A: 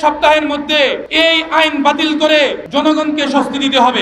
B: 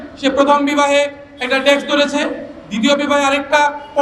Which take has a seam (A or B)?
A